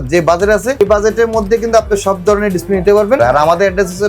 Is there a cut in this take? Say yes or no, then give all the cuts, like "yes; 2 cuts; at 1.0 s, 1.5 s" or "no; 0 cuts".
yes; 2 cuts; at 0.8 s, 3.2 s